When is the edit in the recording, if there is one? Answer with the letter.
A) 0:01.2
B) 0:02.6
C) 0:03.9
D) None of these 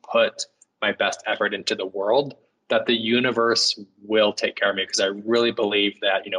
D